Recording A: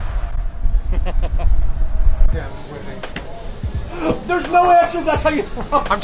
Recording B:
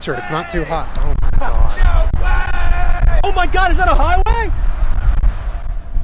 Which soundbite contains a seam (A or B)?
A